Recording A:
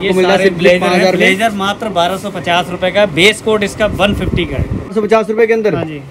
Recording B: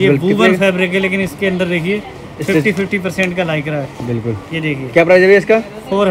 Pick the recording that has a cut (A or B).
A